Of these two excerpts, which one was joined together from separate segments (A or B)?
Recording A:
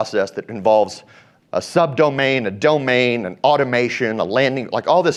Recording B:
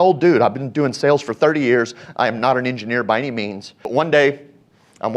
B